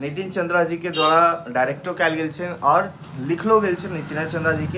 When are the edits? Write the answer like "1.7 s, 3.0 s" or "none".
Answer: none